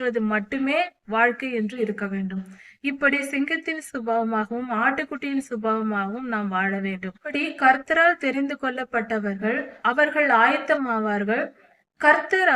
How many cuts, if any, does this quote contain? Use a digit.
2